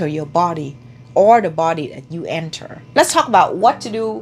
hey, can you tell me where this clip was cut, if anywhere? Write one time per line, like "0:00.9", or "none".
0:02.8